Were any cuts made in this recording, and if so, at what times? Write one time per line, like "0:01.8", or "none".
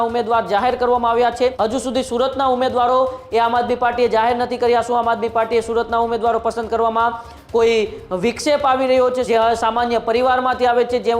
0:01.5
0:09.2